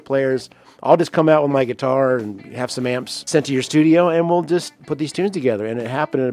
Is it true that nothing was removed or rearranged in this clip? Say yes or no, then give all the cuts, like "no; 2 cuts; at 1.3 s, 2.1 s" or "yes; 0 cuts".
no; 2 cuts; at 3.3 s, 4.8 s